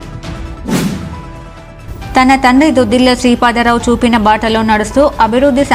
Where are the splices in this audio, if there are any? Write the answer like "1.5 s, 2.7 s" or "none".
1.2 s